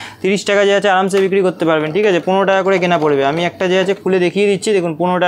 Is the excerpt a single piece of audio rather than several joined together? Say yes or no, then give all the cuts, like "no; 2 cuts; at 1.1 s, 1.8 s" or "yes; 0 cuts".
yes; 0 cuts